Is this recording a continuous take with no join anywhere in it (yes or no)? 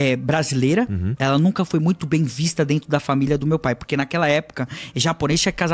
yes